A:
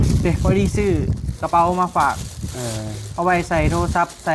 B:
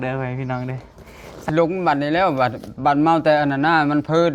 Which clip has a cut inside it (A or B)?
B